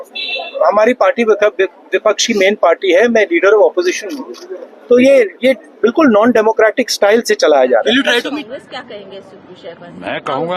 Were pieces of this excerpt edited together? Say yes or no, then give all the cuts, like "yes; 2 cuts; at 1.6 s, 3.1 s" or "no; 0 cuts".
yes; 1 cut; at 8.2 s